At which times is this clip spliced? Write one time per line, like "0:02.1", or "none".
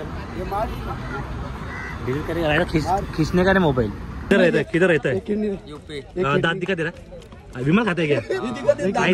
0:04.3